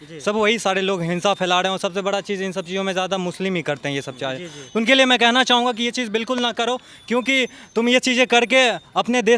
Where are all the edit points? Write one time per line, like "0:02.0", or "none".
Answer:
none